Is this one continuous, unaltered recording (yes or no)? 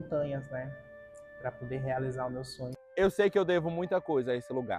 no